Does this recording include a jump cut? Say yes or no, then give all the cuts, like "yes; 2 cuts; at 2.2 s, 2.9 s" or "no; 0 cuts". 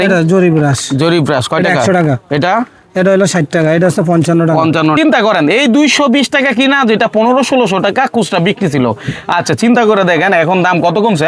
yes; 1 cut; at 5.0 s